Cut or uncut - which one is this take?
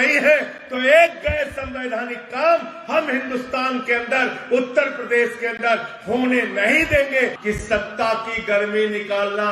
cut